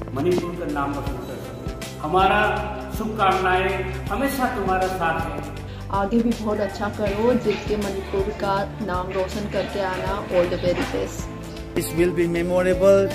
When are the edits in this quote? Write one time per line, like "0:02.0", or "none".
0:11.8